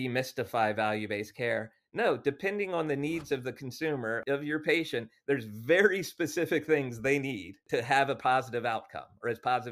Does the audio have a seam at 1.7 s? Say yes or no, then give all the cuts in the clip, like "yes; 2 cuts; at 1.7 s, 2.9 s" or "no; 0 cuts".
no; 2 cuts; at 4.2 s, 7.6 s